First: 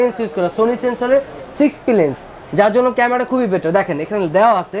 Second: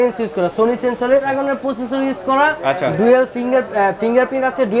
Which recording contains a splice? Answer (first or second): second